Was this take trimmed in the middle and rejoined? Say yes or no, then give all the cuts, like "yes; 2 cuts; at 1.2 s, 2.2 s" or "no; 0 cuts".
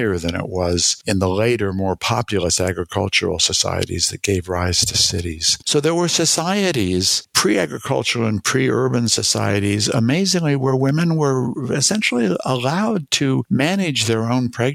yes; 3 cuts; at 5.5 s, 7.2 s, 13.4 s